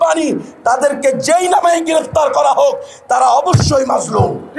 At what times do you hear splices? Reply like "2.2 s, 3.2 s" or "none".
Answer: none